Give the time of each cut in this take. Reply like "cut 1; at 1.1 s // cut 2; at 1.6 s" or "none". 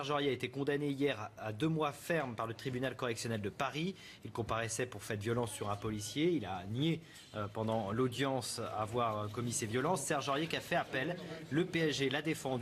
cut 1; at 8.0 s